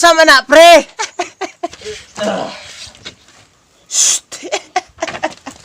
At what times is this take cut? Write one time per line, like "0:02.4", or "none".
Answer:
0:01.8